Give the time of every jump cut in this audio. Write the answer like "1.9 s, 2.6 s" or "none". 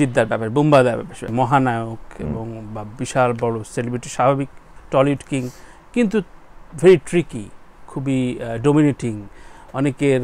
1.2 s, 4.7 s